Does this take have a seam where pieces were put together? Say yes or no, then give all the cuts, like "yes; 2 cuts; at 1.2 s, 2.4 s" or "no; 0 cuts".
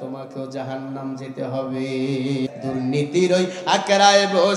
yes; 1 cut; at 2.5 s